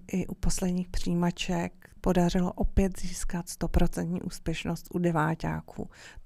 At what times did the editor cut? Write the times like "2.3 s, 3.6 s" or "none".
1.9 s

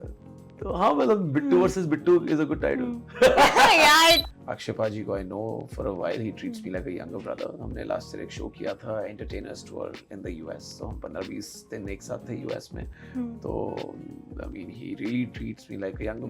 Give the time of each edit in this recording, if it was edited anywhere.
4.2 s

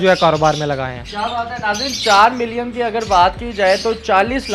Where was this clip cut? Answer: none

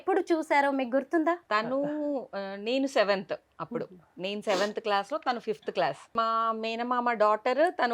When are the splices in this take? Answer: 1.4 s, 6.1 s

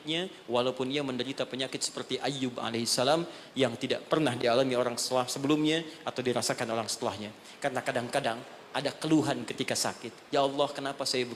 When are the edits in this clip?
none

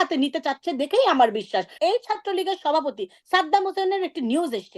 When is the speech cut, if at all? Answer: 1.7 s

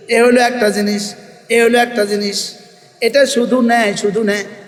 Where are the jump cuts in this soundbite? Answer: none

